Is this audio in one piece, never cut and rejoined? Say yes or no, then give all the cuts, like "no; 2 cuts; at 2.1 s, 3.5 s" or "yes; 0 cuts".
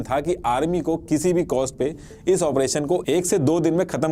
yes; 0 cuts